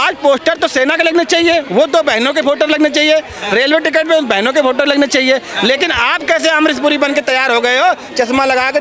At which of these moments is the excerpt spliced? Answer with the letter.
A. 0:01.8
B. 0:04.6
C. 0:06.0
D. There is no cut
D